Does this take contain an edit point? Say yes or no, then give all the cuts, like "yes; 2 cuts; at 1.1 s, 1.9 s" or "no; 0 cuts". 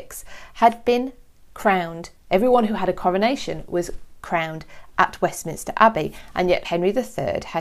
yes; 1 cut; at 6.6 s